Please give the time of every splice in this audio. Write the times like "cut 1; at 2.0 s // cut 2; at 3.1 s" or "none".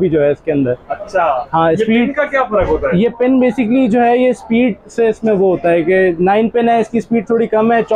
none